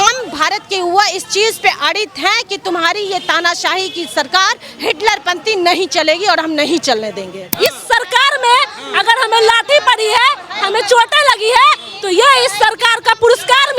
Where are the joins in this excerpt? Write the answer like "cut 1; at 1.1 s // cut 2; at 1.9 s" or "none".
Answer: cut 1; at 7.5 s